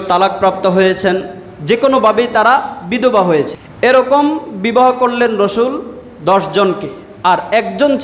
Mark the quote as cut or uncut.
cut